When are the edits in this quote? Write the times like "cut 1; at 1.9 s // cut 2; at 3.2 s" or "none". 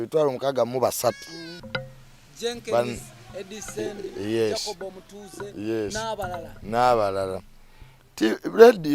cut 1; at 1.6 s